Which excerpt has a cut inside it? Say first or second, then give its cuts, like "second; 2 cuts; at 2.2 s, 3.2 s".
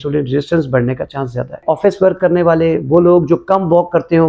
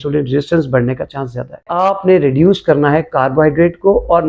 second; 1 cut; at 1.6 s